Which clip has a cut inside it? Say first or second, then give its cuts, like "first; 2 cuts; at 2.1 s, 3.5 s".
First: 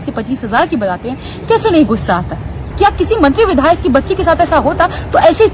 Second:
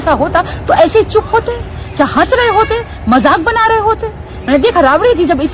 first; 1 cut; at 2.7 s